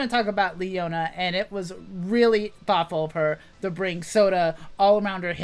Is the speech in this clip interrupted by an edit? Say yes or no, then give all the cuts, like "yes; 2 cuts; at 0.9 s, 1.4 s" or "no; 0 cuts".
no; 0 cuts